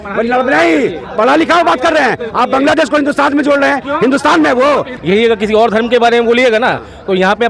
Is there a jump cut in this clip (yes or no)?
yes